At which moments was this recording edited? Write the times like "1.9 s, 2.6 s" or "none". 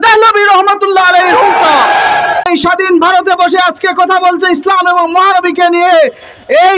2.5 s